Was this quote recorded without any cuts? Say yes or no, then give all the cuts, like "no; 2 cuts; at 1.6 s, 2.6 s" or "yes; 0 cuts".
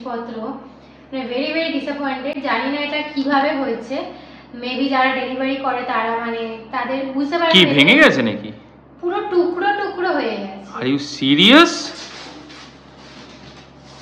yes; 0 cuts